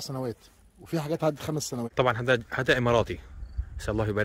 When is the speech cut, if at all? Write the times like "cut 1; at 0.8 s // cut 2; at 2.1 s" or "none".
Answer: cut 1; at 1.9 s